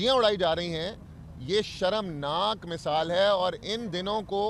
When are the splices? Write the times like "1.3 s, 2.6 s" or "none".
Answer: none

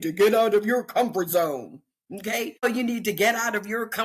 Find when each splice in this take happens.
2.6 s

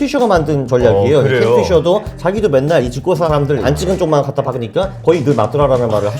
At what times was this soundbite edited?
3.6 s

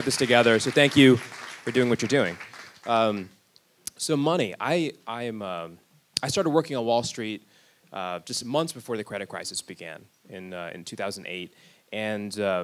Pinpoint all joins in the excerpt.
none

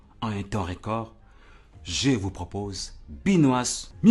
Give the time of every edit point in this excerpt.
none

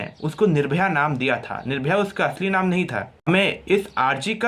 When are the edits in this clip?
3.1 s

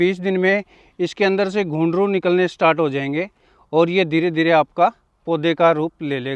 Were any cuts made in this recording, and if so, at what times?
none

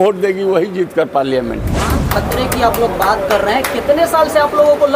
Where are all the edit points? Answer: 1.8 s

